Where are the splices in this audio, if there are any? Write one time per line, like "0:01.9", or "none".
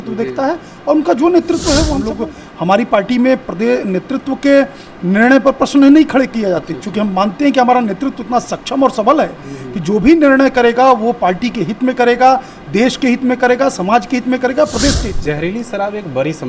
0:02.0
0:15.2